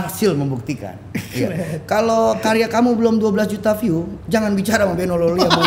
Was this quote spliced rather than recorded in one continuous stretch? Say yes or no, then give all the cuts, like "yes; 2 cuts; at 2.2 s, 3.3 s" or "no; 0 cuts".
no; 0 cuts